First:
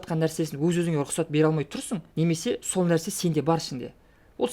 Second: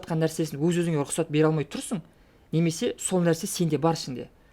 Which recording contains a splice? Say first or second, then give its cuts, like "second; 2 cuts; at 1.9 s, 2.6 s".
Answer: first; 1 cut; at 2.0 s